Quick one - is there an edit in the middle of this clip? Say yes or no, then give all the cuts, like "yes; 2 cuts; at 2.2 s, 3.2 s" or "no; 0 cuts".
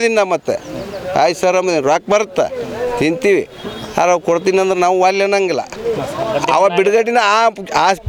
no; 0 cuts